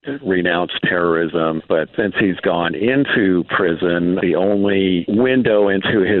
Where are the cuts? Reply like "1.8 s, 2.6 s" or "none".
none